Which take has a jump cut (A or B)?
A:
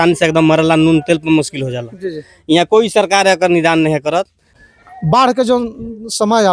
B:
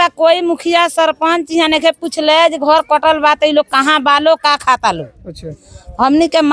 A